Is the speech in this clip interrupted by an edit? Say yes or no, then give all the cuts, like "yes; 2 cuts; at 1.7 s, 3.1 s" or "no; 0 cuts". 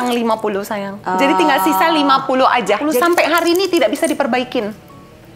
yes; 1 cut; at 2.9 s